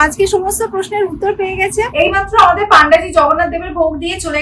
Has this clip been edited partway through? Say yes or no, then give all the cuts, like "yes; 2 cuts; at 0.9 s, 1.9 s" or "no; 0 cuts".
yes; 1 cut; at 1.9 s